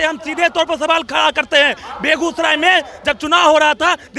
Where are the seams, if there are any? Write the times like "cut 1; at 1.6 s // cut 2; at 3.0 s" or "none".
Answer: none